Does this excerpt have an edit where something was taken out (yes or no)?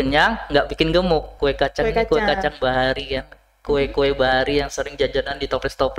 yes